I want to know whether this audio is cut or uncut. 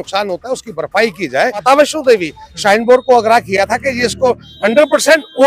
cut